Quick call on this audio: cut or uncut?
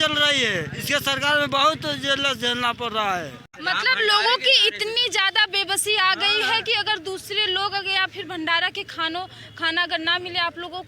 cut